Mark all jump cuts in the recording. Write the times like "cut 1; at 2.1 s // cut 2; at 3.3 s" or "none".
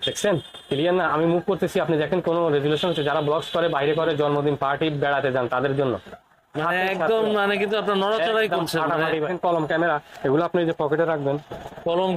cut 1; at 9.3 s